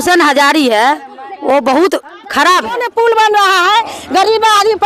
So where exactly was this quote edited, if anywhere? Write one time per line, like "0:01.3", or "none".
0:02.8